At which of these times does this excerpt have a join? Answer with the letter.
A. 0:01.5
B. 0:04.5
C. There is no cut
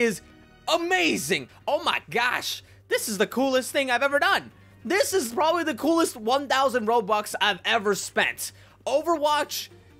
A